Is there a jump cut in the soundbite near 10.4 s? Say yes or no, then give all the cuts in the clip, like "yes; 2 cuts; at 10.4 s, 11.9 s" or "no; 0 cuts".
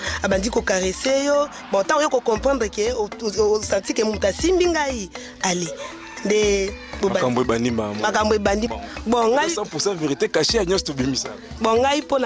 no; 1 cut; at 8.7 s